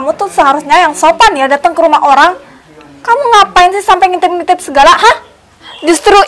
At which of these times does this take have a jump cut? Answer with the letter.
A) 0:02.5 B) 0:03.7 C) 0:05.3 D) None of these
C